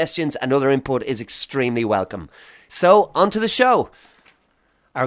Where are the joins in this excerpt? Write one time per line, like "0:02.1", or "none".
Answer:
none

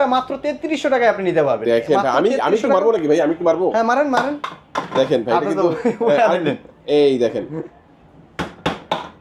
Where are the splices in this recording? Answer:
none

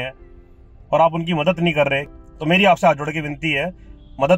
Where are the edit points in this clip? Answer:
0:02.1

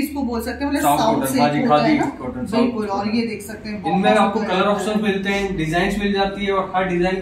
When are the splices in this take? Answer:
none

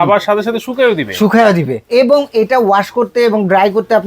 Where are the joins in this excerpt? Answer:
0:01.8

